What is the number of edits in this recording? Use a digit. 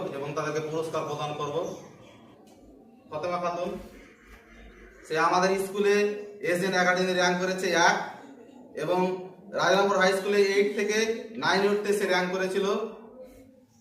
1